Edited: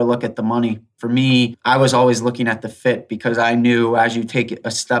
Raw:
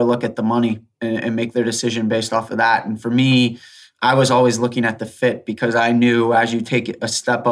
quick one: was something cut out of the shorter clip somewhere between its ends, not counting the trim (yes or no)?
yes